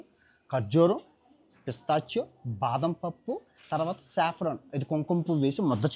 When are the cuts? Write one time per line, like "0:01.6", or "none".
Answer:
none